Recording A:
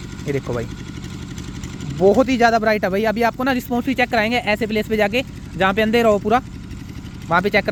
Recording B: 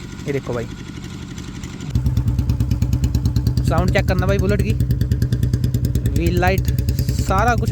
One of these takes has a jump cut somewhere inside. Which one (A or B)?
B